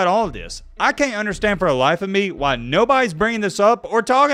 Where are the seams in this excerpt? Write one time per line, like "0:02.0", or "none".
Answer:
none